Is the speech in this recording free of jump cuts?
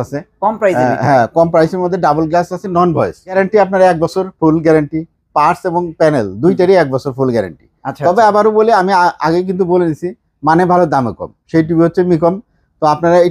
no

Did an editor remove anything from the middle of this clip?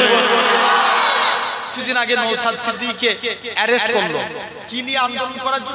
yes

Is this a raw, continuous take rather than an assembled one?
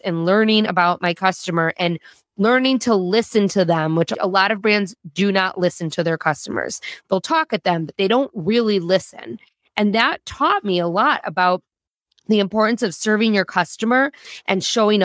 no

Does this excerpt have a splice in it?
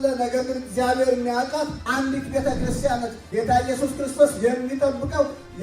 yes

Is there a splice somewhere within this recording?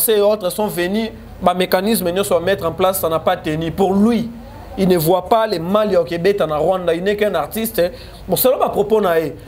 no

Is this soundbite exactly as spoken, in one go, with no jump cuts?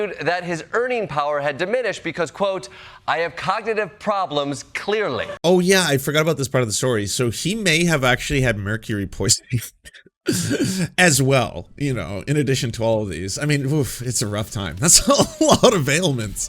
no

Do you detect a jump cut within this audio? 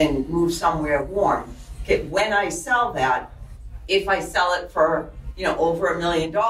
no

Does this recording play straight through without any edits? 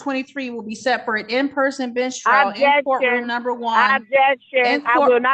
yes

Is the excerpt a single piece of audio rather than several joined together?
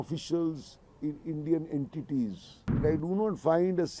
no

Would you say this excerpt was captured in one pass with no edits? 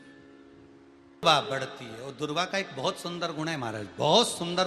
no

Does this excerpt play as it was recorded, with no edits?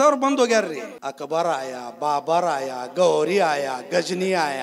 no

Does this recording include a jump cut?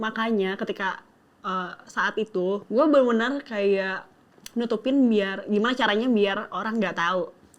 yes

